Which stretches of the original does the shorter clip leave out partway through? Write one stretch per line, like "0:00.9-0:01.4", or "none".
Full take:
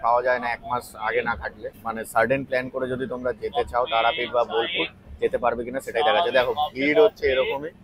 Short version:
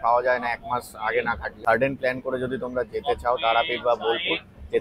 0:01.5-0:02.0

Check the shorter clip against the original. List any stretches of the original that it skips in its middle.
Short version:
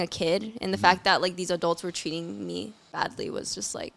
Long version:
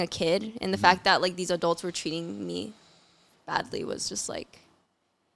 0:02.8-0:03.3

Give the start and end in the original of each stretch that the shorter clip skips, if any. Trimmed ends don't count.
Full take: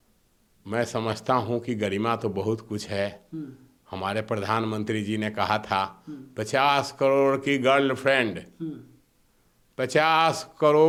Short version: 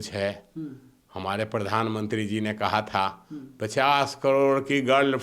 none

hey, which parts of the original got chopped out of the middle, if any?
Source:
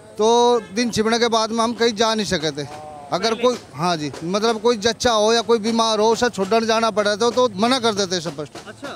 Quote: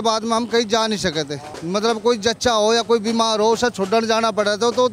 0:02.8-0:04.1

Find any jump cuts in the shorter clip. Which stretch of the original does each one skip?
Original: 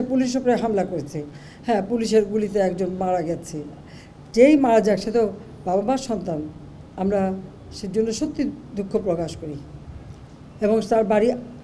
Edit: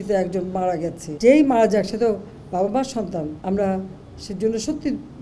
0:03.5-0:04.2
0:06.5-0:06.9

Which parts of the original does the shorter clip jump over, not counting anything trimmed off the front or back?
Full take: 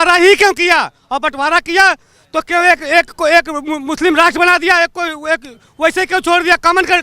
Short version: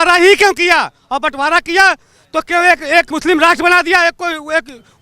0:03.1-0:03.9

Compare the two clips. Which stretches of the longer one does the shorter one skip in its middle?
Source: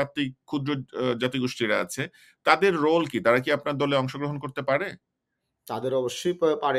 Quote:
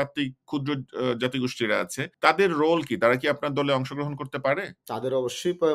0:02.0-0:02.3
0:05.0-0:05.6

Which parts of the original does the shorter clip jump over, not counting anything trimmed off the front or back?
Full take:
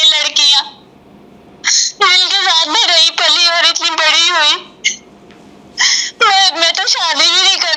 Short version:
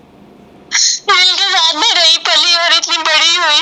none

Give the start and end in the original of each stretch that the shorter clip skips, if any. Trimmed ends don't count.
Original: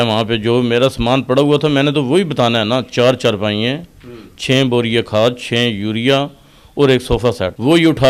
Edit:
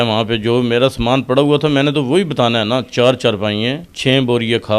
0:03.9-0:04.3

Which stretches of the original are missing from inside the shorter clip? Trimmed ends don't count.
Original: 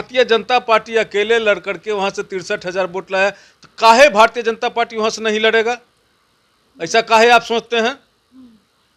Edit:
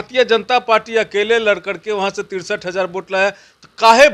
none

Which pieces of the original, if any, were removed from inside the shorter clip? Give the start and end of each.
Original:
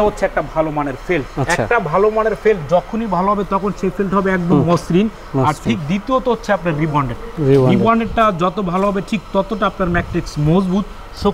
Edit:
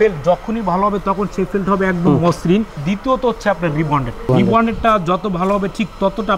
0:05.2-0:05.8
0:07.3-0:07.6

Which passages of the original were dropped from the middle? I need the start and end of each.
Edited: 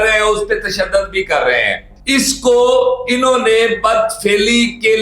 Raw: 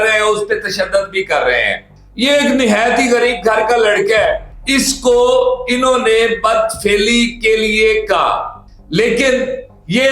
0:01.9-0:04.5

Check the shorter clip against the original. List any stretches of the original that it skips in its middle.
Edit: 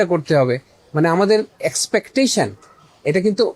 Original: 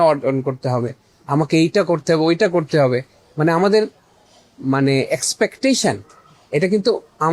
0:04.0-0:05.1

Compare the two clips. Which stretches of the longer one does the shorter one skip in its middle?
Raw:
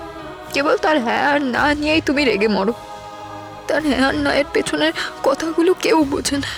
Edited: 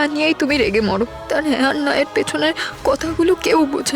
0:02.8-0:03.6

